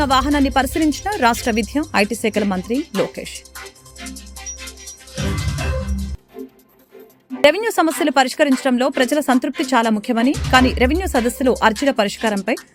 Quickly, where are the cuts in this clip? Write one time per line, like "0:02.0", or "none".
none